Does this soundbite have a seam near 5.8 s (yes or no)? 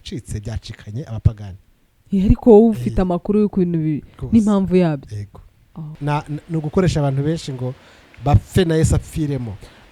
yes